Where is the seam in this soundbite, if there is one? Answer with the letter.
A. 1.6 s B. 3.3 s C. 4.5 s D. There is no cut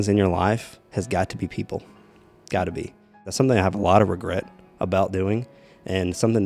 B